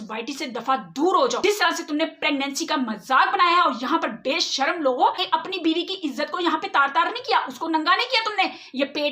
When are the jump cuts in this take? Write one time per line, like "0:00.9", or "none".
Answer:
0:01.4
0:05.2